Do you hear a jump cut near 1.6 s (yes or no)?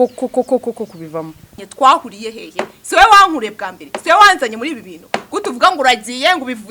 yes